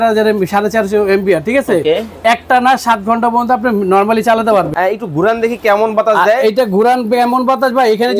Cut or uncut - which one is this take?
cut